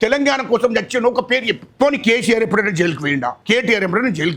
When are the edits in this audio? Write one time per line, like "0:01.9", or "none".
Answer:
none